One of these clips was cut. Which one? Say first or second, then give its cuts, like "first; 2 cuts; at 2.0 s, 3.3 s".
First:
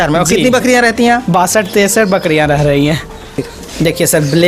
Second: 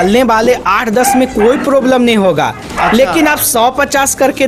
first; 1 cut; at 3.3 s